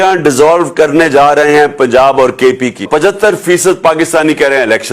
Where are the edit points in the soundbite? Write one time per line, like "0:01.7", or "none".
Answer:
0:02.9